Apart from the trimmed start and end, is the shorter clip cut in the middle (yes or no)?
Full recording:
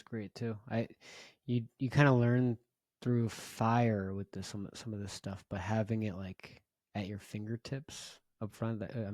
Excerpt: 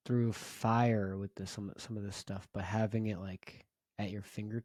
no